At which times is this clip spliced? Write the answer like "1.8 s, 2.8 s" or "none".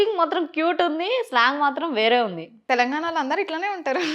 2.5 s